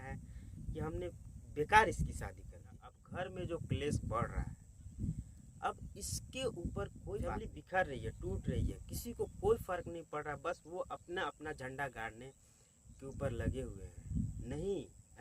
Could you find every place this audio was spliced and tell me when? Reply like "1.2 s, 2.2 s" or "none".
3.0 s, 7.5 s